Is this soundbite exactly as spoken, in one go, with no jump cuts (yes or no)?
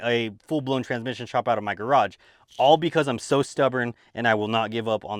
yes